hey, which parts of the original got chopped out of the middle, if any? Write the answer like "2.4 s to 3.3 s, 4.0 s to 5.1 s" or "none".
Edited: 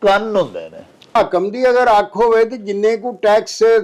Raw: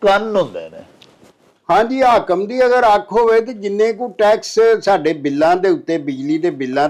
1.2 s to 2.1 s